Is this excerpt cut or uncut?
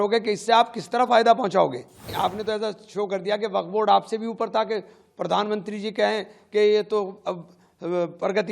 cut